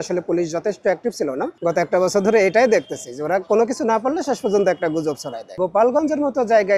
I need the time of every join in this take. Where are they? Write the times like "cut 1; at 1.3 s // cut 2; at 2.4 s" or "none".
cut 1; at 1.5 s // cut 2; at 5.5 s

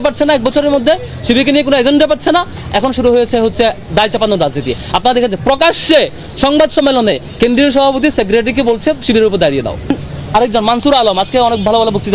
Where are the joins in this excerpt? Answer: cut 1; at 9.9 s

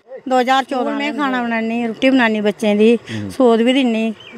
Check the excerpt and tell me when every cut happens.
cut 1; at 1.1 s

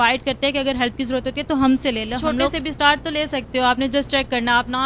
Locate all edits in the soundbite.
cut 1; at 2.6 s

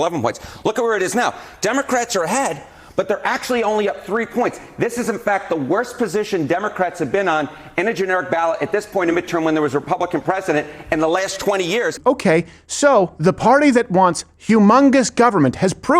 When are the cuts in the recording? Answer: cut 1; at 12.0 s

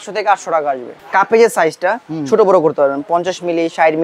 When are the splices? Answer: cut 1; at 0.9 s

